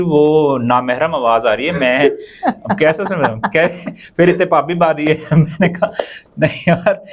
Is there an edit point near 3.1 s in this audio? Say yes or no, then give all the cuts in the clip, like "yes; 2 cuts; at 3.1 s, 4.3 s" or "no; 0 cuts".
no; 0 cuts